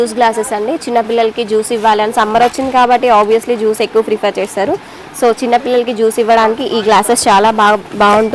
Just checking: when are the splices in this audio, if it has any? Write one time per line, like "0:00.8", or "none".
none